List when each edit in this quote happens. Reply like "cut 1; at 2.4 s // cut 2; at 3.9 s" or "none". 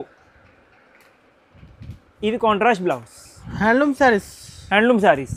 none